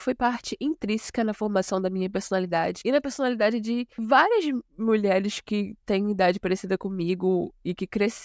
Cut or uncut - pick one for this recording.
cut